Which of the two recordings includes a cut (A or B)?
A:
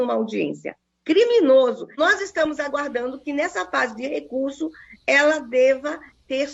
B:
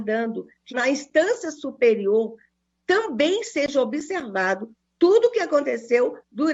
A